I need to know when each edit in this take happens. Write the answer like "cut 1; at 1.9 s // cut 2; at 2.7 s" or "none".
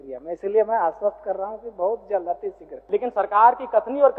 cut 1; at 2.7 s